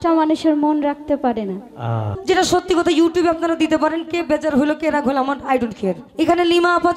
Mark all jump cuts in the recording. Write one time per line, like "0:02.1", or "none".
0:02.1
0:06.1